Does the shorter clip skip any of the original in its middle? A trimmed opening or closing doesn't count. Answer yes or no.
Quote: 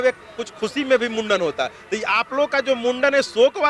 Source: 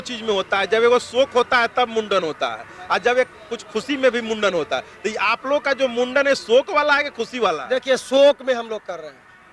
no